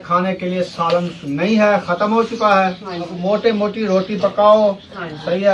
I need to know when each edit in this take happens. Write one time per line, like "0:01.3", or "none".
0:03.2

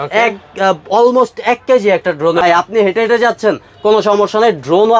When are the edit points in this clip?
0:02.4

